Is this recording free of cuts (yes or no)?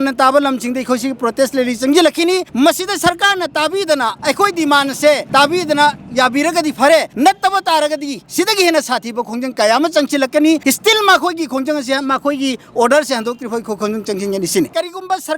no